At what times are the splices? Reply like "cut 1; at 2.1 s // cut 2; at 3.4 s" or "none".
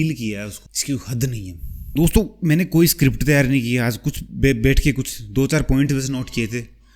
cut 1; at 1.9 s